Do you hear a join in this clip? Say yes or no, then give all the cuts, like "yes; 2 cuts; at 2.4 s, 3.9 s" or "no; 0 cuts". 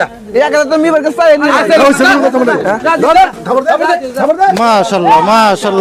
no; 0 cuts